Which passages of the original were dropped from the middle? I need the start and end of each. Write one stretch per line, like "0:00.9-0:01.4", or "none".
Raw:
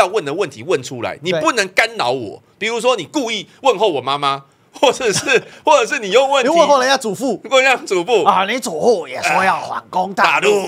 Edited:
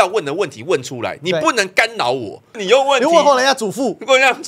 0:02.5-0:06.0